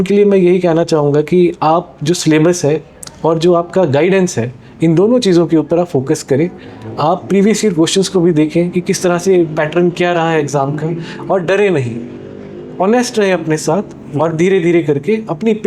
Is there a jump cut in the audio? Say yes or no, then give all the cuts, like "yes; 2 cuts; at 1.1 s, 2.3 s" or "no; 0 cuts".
no; 0 cuts